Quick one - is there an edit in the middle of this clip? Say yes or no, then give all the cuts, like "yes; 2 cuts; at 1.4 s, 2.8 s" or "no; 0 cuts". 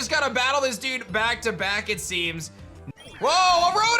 yes; 1 cut; at 2.8 s